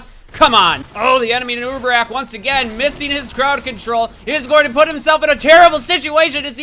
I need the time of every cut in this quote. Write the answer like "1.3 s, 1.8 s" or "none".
0.8 s, 4.7 s